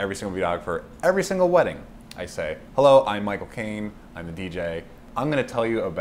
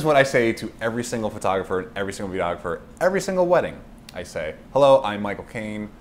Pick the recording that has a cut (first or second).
first